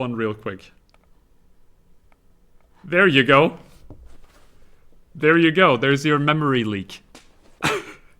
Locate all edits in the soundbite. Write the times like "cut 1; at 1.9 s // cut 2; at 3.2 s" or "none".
cut 1; at 1.2 s

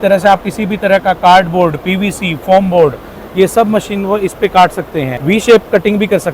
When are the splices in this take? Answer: cut 1; at 5.1 s

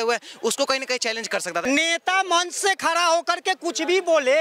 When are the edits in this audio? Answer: cut 1; at 1.6 s

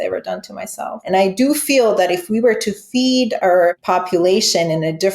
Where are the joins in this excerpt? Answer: cut 1; at 1.0 s // cut 2; at 3.8 s

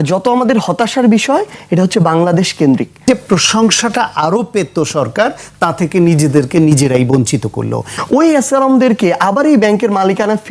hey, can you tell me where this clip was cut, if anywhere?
cut 1; at 3.0 s // cut 2; at 7.9 s

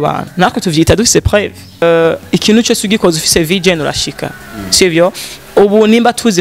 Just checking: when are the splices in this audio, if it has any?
cut 1; at 1.8 s

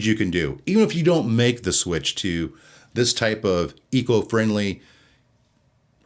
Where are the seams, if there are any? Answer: none

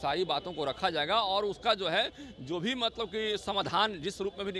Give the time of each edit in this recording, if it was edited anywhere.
none

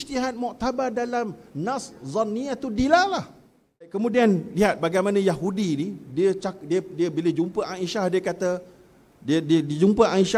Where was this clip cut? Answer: cut 1; at 3.9 s

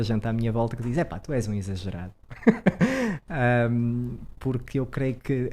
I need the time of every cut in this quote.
none

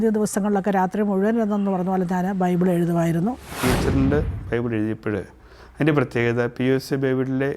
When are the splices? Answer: cut 1; at 3.5 s

